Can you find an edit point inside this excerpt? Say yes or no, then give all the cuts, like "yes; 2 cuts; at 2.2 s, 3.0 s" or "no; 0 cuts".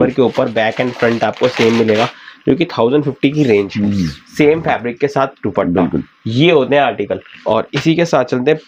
no; 0 cuts